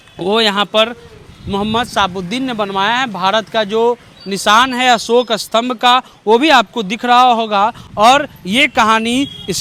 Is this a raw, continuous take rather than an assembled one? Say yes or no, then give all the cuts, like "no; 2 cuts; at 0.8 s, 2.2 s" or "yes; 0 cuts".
yes; 0 cuts